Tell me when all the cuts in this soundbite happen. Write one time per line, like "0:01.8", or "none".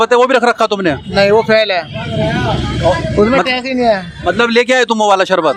none